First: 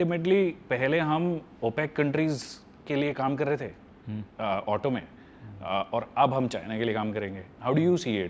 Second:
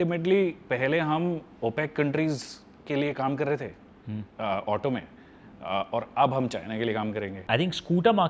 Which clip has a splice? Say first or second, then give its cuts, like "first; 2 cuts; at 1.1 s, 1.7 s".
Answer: second; 1 cut; at 7.4 s